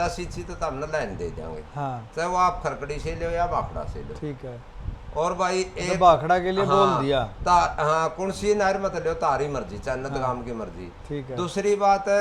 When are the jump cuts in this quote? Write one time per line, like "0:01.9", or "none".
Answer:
none